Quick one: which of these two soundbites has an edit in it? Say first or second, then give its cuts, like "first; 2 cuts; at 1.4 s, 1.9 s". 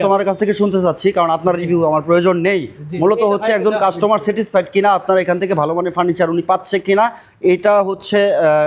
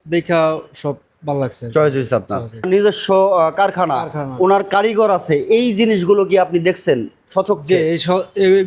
second; 1 cut; at 2.7 s